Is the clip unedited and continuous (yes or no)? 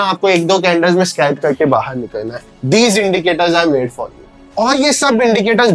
yes